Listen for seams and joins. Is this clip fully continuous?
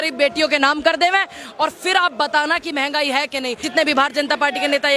no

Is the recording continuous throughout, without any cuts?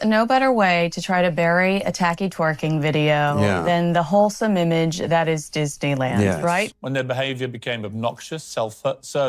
no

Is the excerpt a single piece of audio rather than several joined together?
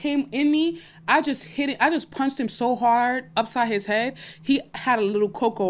yes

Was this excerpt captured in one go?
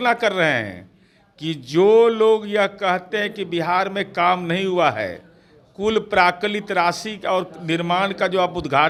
yes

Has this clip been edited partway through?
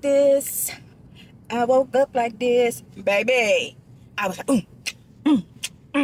no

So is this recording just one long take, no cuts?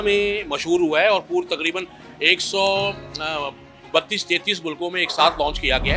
yes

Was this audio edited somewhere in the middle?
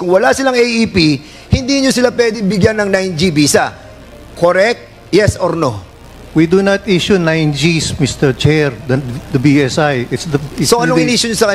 no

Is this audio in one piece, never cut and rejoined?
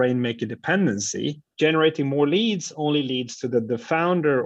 no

